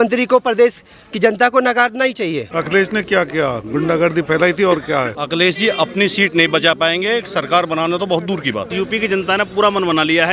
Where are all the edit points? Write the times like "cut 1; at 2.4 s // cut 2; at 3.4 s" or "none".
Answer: cut 1; at 2.5 s // cut 2; at 5.2 s // cut 3; at 8.7 s